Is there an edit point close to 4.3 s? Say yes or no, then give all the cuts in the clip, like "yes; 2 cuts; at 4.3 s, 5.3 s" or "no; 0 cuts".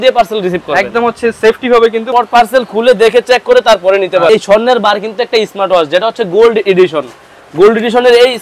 yes; 2 cuts; at 2.0 s, 4.3 s